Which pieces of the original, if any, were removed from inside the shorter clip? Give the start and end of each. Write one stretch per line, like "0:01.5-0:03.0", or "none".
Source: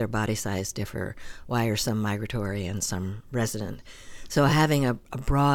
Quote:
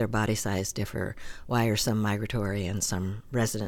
none